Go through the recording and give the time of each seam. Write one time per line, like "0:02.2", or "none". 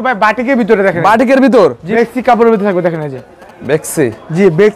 0:02.0